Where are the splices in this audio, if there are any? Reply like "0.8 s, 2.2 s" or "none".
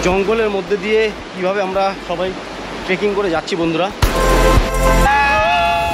4.0 s, 5.1 s